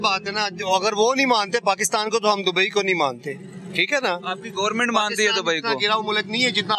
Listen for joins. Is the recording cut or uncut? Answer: uncut